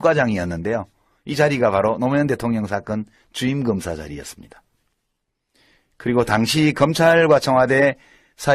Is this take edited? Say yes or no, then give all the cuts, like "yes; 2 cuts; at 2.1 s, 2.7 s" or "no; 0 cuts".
no; 0 cuts